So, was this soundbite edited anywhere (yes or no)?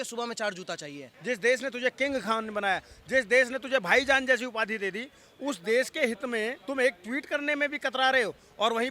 yes